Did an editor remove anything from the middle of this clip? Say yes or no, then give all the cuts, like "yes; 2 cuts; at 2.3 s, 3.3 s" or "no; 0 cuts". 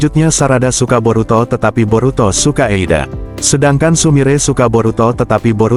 no; 0 cuts